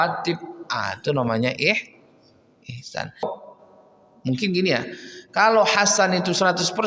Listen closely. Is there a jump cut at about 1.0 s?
no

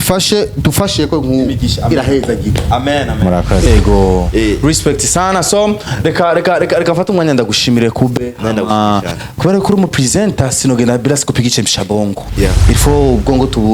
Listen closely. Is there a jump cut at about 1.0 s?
no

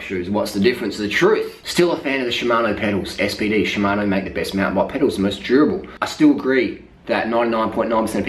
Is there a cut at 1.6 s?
yes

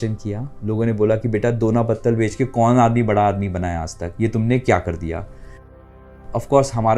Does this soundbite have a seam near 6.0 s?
yes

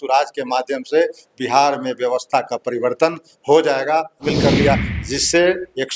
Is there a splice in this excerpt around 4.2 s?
yes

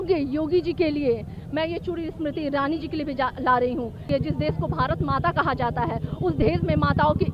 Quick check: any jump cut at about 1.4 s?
yes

